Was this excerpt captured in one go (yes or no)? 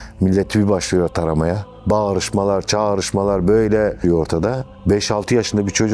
no